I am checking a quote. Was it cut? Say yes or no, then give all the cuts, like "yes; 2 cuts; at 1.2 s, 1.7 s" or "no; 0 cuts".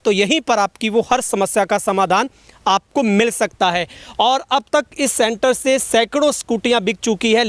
no; 0 cuts